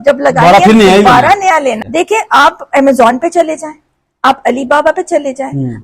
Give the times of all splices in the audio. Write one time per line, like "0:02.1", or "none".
0:01.8